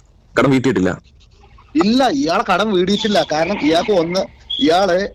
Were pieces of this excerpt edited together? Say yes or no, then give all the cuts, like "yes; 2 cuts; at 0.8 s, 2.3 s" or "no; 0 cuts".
no; 0 cuts